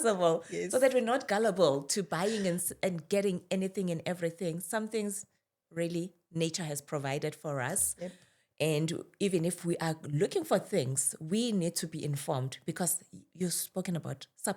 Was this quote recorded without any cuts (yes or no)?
yes